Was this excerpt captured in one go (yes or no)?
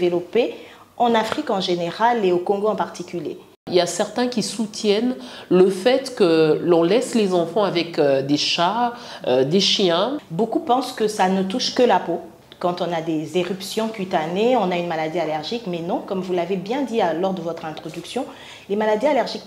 no